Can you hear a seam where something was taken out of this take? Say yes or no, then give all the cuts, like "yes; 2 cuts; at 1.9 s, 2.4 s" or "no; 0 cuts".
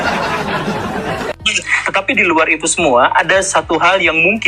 yes; 1 cut; at 1.6 s